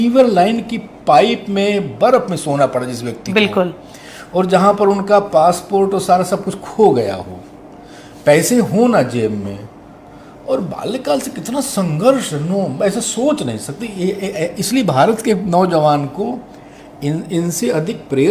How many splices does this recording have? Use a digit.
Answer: 0